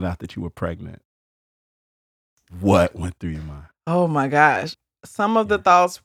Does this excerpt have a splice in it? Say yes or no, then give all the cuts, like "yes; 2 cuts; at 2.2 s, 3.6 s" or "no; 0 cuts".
no; 0 cuts